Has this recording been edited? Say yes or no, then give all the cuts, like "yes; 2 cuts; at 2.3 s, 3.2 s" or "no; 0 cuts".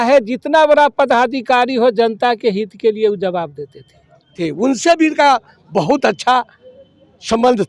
yes; 1 cut; at 4.3 s